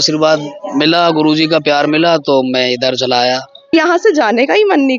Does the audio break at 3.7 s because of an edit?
yes; 1 cut; at 3.7 s

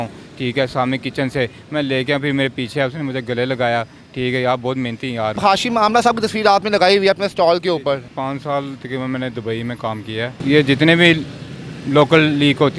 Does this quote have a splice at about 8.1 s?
yes; 3 cuts; at 5.4 s, 8.1 s, 10.4 s

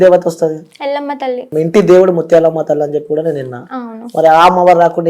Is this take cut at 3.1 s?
no; 1 cut; at 1.5 s

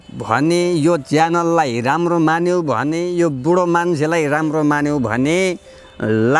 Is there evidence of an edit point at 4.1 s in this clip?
no; 0 cuts

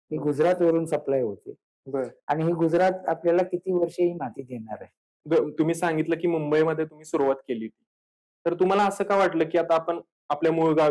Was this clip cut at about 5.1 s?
yes; 1 cut; at 5.1 s

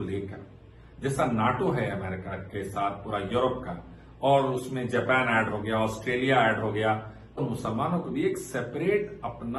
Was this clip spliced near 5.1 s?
no; 0 cuts

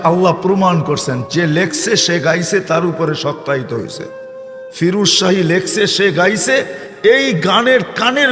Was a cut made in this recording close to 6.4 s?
yes; 1 cut; at 6.4 s

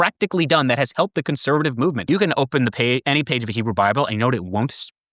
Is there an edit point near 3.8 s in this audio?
no; 1 cut; at 2.0 s

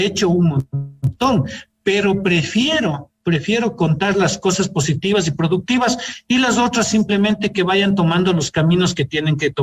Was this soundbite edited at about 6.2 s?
no; 0 cuts

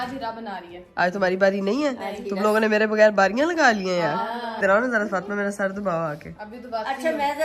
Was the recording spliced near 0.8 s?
no; 0 cuts

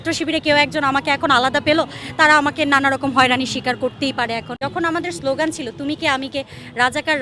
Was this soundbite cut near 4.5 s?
yes; 1 cut; at 4.5 s

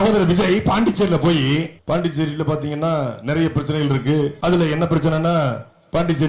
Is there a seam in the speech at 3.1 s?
no; 2 cuts; at 1.8 s, 4.4 s

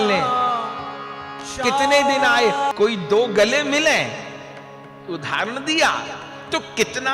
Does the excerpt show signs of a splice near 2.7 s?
yes; 1 cut; at 2.7 s

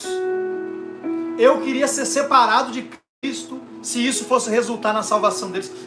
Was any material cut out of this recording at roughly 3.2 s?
no; 0 cuts

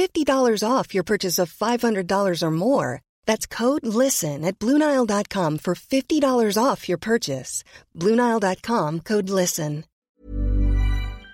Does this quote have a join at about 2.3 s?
no; 1 cut; at 10.1 s

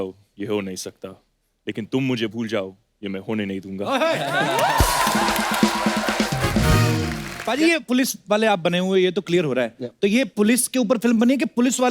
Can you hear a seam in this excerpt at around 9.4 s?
no; 1 cut; at 7.4 s

